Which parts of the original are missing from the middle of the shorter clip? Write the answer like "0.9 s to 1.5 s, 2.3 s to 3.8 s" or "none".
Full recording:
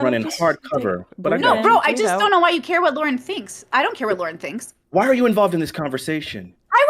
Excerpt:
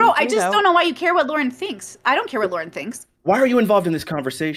none